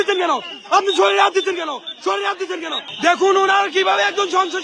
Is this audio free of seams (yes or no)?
no